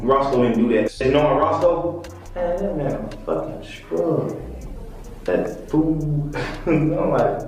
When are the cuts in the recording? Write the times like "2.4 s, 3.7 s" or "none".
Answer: 1.2 s